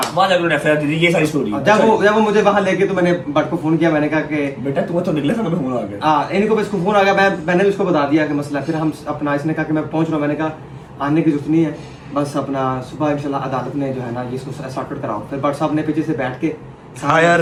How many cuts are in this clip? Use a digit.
0